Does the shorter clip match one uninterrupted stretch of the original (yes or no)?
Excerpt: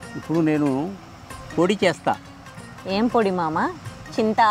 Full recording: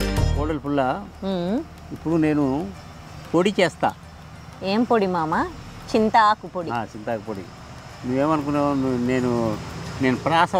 yes